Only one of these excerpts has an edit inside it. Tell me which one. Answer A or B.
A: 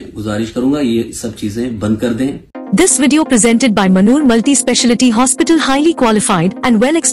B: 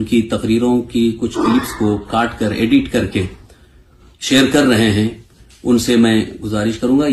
A